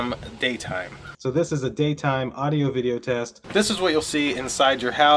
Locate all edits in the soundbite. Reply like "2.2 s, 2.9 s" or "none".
3.4 s